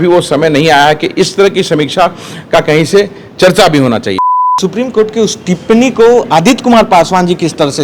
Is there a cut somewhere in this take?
yes; 1 cut; at 4.2 s

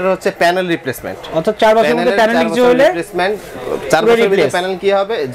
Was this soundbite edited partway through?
no; 0 cuts

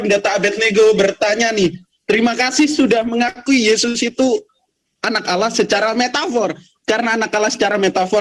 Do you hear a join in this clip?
no; 0 cuts

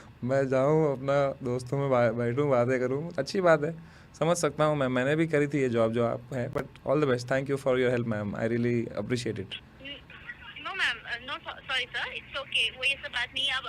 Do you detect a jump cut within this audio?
no; 0 cuts

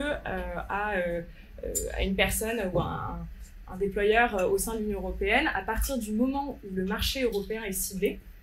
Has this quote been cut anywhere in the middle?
no; 0 cuts

